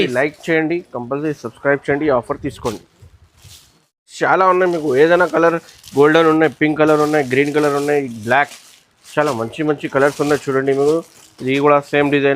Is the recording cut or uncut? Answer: uncut